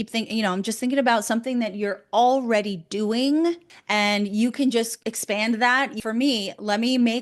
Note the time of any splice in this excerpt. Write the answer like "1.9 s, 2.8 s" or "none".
3.7 s, 6.0 s